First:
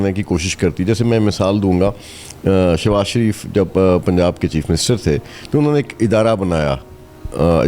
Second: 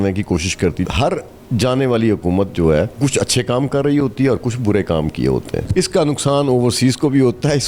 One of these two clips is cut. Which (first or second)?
second